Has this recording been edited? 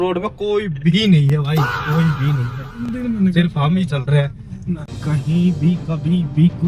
yes; 1 cut; at 4.9 s

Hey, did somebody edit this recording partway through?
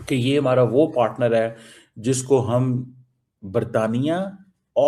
no; 0 cuts

